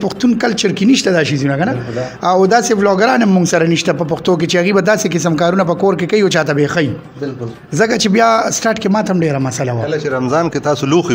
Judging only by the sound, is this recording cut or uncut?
uncut